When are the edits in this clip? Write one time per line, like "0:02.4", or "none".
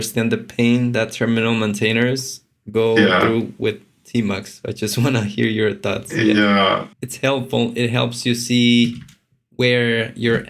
0:06.9